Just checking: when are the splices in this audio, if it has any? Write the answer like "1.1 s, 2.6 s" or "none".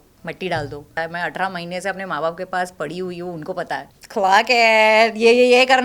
1.0 s, 4.0 s